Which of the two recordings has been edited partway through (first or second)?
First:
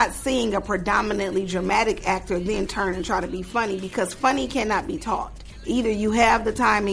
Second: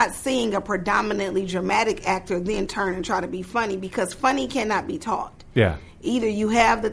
first